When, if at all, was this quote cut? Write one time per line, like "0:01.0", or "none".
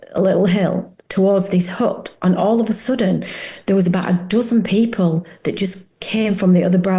none